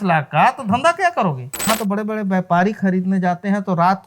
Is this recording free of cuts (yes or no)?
no